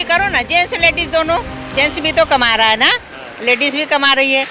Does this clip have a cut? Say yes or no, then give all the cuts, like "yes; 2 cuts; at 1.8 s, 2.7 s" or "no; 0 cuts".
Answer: no; 0 cuts